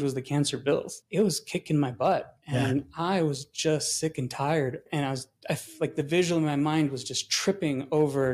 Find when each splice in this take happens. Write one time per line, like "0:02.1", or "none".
0:00.9
0:04.8